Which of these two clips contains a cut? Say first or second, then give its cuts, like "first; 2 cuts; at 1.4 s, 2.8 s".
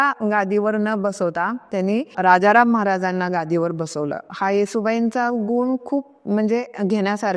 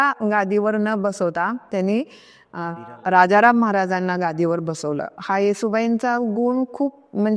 first; 1 cut; at 2.1 s